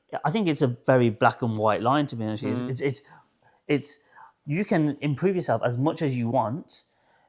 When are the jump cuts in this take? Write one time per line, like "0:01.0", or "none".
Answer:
none